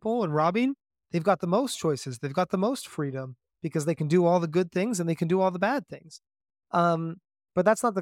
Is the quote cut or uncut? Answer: uncut